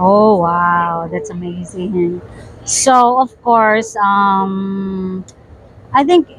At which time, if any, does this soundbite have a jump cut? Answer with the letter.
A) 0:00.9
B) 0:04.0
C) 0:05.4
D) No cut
D